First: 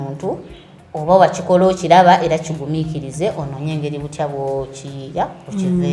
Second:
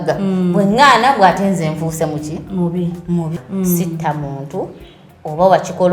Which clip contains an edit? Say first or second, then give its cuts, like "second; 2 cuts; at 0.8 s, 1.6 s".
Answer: second; 1 cut; at 3.4 s